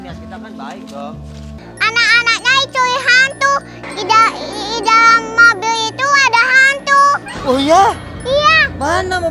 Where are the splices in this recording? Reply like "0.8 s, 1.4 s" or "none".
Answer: 1.6 s